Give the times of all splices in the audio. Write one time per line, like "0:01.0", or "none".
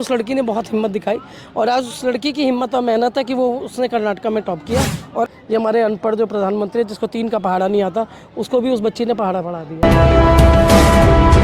0:05.3
0:09.8